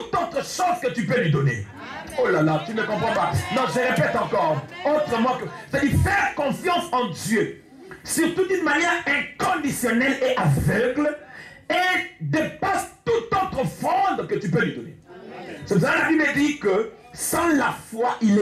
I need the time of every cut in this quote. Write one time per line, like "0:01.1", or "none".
none